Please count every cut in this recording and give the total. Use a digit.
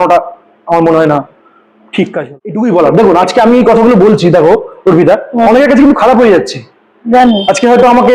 1